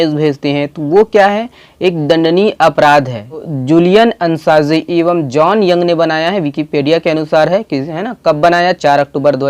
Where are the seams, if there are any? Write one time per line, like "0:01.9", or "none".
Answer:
0:03.5

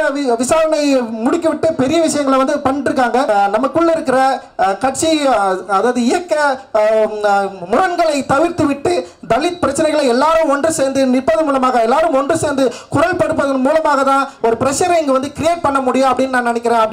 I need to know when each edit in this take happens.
0:03.3

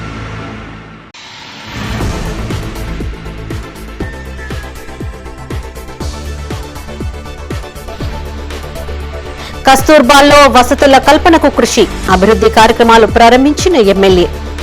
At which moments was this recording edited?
0:00.9

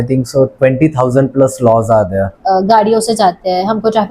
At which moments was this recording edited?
0:02.4

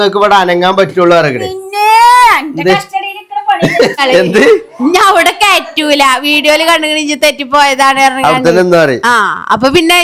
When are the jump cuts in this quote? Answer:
0:04.0

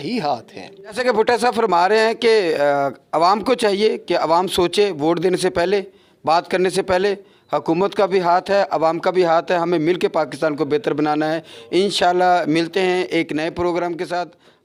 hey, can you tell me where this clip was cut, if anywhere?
none

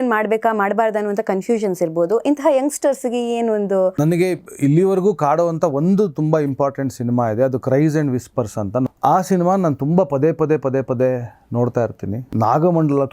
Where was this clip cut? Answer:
0:03.9
0:08.9
0:12.2

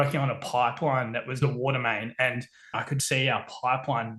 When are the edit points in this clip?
0:01.4
0:02.8

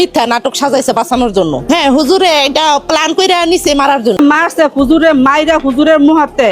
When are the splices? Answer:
0:04.2

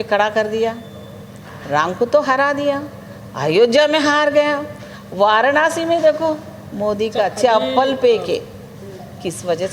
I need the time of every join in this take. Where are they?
none

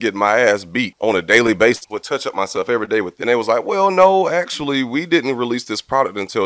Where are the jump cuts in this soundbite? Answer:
0:00.9
0:01.9
0:03.1

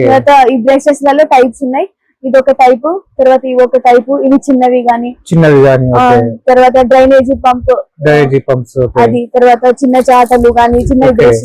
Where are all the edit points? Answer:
none

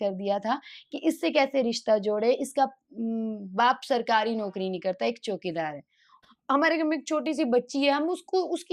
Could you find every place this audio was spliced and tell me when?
0:06.1

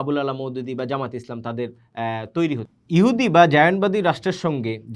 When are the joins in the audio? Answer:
0:02.6

